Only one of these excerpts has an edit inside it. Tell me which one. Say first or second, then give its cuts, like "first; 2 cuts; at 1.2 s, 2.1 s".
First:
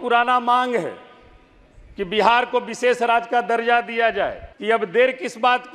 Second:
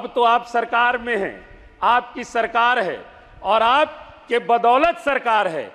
first; 1 cut; at 4.5 s